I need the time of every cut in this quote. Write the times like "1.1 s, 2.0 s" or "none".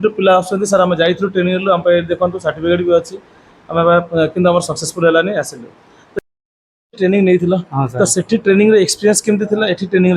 6.1 s